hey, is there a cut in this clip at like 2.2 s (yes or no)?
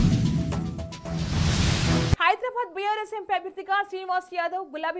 yes